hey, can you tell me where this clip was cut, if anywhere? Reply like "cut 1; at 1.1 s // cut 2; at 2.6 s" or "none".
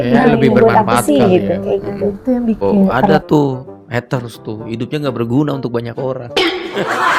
cut 1; at 2.6 s